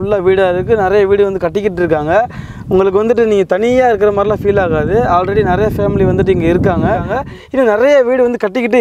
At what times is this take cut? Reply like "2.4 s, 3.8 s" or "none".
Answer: 7.1 s